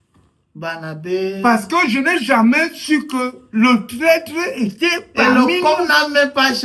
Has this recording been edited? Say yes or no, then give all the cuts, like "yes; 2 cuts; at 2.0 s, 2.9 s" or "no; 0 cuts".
no; 0 cuts